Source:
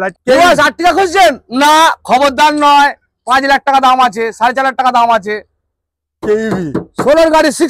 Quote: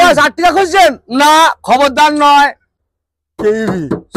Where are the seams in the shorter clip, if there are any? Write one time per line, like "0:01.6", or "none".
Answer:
0:02.7